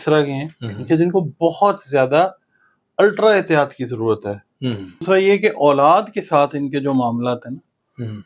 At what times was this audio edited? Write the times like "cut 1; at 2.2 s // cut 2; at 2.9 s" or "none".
cut 1; at 5.0 s